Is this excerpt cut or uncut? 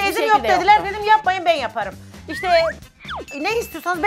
cut